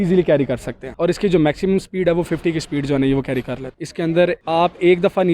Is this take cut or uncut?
cut